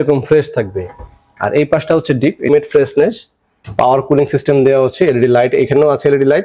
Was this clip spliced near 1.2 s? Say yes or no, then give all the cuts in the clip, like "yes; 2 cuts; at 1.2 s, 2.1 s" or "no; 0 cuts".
no; 1 cut; at 2.5 s